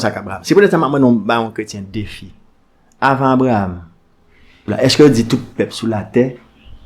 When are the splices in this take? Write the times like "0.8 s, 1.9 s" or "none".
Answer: 4.6 s